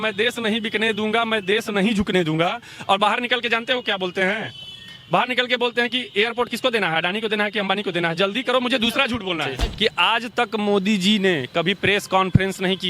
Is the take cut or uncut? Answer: cut